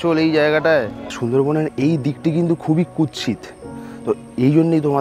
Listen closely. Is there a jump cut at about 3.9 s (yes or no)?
no